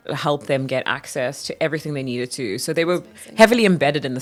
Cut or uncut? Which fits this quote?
uncut